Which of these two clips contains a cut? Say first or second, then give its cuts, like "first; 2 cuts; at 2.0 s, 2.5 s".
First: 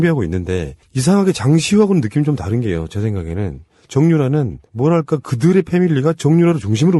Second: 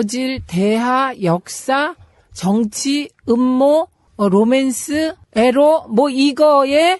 second; 1 cut; at 1.2 s